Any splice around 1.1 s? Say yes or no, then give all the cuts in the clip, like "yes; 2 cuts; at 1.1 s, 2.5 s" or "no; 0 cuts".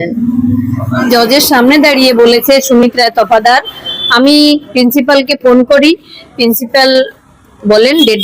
yes; 1 cut; at 1.1 s